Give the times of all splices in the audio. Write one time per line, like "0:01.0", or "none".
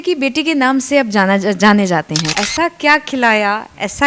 0:02.2